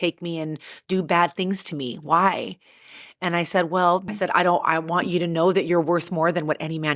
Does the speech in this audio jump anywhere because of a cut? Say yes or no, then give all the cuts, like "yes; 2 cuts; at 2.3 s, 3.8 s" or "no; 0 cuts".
yes; 1 cut; at 4.0 s